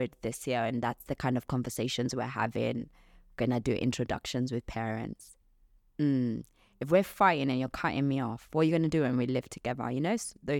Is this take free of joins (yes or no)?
yes